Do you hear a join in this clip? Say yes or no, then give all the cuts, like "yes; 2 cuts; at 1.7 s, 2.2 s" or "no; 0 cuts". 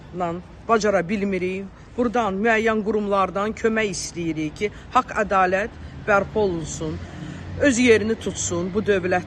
no; 0 cuts